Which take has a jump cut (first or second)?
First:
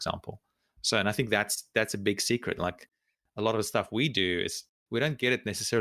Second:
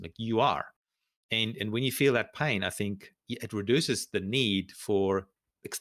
first